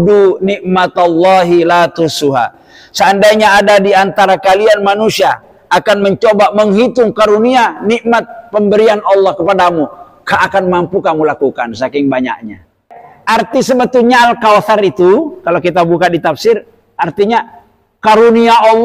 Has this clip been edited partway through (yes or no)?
yes